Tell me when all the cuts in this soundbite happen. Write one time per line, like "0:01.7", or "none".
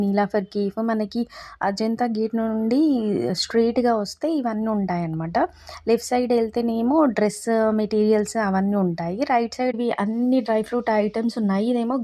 0:09.7